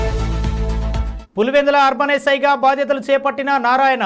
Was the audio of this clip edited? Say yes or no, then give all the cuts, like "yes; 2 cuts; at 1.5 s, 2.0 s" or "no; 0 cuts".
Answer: no; 0 cuts